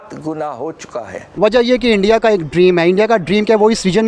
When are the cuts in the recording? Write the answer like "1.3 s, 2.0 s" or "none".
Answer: 1.2 s